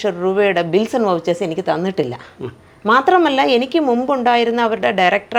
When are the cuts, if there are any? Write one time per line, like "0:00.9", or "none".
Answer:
none